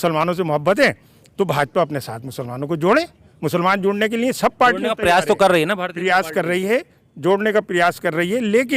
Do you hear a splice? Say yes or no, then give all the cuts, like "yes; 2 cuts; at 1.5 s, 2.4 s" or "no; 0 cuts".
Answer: no; 0 cuts